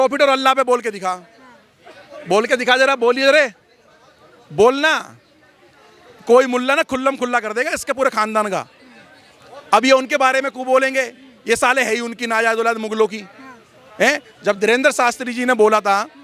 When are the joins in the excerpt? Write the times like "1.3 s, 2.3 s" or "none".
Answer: none